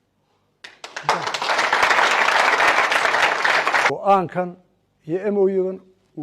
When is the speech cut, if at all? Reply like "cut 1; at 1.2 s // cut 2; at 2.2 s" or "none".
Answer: cut 1; at 3.9 s